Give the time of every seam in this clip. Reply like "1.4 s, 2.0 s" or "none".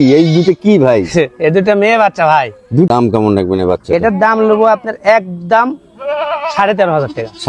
2.9 s